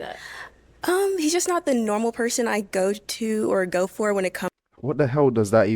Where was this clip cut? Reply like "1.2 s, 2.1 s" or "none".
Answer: none